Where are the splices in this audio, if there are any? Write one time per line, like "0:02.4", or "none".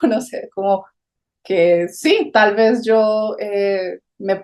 none